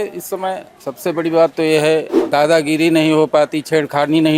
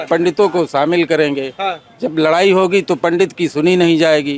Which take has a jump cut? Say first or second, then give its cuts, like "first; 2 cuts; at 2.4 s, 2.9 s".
first; 1 cut; at 2.2 s